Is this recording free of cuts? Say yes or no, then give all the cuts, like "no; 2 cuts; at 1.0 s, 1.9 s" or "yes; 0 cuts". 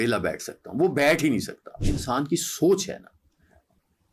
no; 1 cut; at 2.0 s